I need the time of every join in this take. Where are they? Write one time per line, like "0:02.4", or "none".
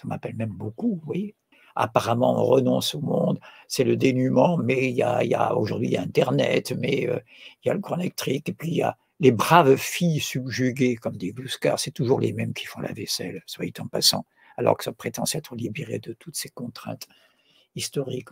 0:01.4